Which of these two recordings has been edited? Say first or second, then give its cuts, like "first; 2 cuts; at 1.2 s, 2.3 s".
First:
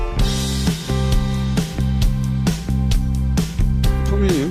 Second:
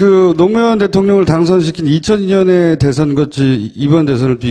second; 1 cut; at 3.4 s